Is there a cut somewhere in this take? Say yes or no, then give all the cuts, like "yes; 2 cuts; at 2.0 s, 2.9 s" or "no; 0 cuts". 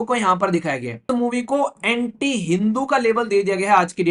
yes; 1 cut; at 1.0 s